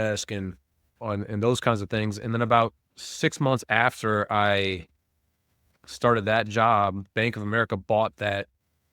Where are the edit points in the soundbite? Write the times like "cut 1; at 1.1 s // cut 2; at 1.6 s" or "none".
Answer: cut 1; at 1.0 s